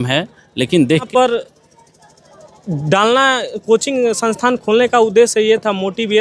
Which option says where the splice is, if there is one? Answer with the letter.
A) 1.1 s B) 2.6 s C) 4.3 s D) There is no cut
A